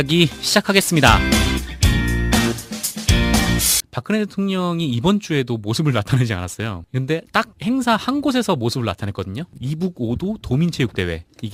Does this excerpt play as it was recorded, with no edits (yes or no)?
yes